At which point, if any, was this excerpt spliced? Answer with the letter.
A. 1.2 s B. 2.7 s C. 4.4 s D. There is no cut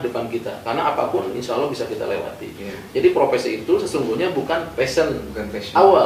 D